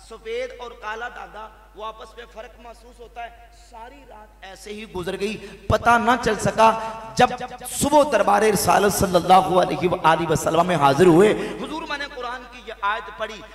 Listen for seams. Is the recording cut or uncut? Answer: uncut